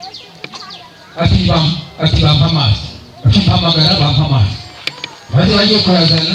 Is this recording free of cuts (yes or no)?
yes